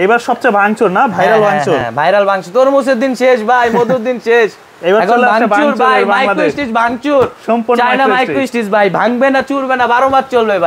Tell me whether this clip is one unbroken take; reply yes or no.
yes